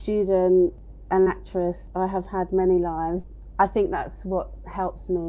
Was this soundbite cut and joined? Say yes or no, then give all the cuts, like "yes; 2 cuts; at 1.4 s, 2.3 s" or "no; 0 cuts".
yes; 3 cuts; at 0.8 s, 1.8 s, 3.4 s